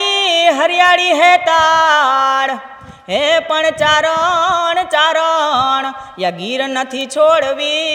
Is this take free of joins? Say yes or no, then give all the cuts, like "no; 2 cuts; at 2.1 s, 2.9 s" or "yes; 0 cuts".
yes; 0 cuts